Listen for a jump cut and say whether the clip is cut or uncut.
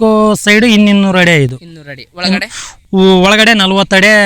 uncut